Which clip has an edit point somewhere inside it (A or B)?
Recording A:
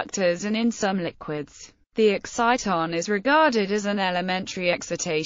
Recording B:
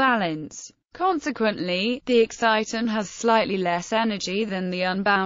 A